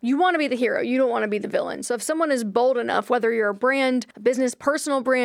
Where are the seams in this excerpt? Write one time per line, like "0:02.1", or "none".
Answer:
0:04.1